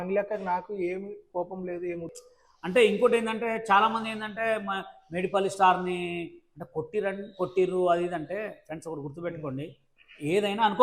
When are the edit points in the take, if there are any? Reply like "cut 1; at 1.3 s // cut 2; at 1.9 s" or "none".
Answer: cut 1; at 2.1 s